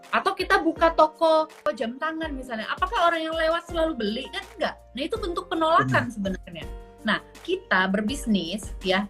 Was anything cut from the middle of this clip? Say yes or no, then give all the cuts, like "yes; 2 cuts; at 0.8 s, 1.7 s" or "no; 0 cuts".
yes; 1 cut; at 1.7 s